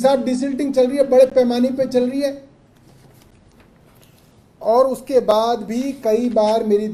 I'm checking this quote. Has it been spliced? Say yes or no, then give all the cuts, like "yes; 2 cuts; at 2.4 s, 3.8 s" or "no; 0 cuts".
no; 0 cuts